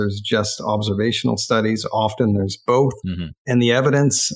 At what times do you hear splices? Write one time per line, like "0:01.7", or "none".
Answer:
0:03.4